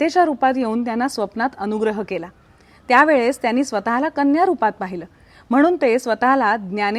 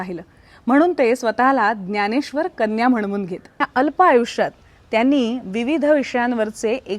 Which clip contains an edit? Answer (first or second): second